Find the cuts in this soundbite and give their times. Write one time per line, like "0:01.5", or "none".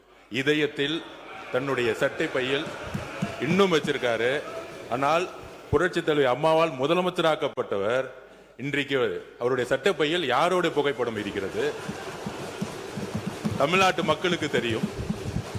none